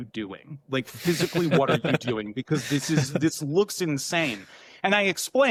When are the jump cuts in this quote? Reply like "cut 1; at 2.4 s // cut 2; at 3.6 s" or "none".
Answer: none